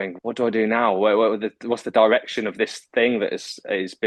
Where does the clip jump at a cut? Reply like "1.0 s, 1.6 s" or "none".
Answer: none